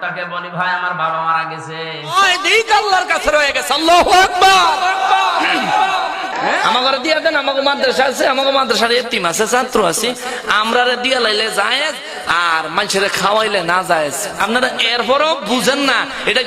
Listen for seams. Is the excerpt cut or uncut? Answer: cut